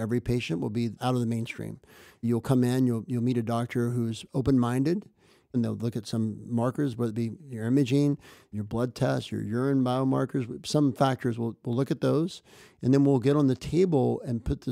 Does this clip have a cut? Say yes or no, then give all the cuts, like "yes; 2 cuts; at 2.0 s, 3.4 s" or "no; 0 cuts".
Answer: yes; 4 cuts; at 1.0 s, 2.2 s, 5.5 s, 8.5 s